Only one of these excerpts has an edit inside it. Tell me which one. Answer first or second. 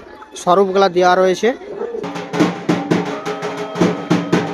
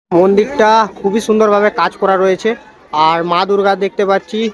first